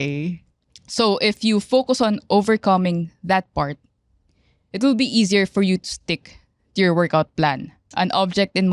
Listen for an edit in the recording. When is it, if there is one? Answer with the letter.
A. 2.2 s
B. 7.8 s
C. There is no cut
B